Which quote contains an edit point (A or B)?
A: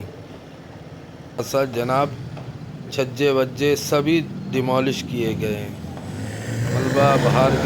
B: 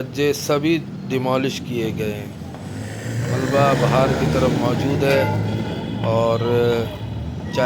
A